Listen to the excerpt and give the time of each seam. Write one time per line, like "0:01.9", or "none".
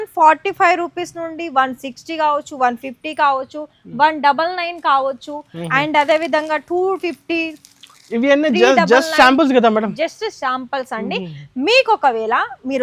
none